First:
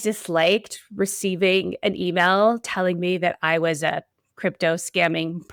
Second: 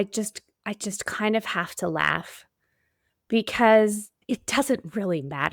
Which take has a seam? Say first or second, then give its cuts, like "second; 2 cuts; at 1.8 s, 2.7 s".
second; 1 cut; at 4.1 s